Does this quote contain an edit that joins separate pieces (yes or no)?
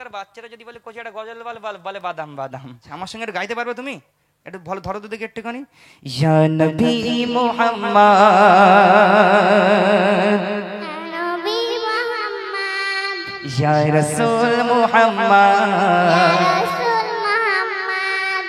yes